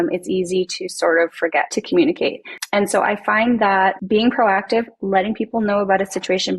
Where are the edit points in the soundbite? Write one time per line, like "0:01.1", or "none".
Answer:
0:01.7
0:02.5
0:04.0